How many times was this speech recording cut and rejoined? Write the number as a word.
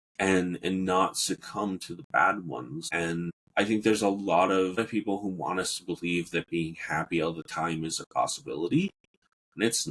two